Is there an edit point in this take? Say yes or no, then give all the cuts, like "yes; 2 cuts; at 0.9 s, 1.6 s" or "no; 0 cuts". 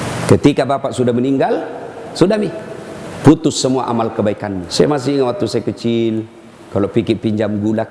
yes; 1 cut; at 4.6 s